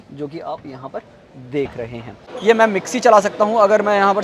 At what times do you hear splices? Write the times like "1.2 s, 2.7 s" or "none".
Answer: 2.3 s